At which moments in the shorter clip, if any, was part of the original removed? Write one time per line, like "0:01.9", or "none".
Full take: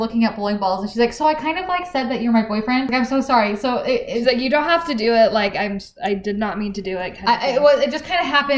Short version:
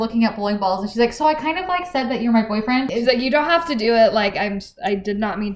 0:02.9